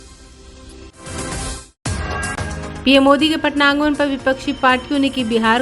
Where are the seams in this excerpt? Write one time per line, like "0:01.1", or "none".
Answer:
0:00.9
0:02.4